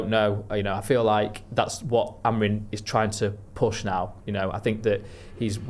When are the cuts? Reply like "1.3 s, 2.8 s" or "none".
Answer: none